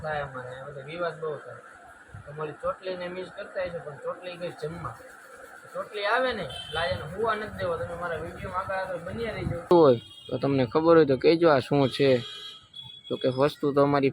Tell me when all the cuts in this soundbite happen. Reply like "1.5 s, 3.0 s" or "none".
9.7 s